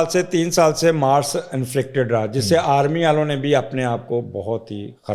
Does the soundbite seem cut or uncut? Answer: uncut